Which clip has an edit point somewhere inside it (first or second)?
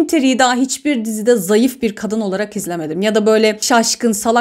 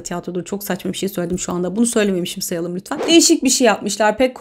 second